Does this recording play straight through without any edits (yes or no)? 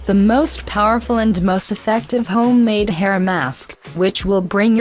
no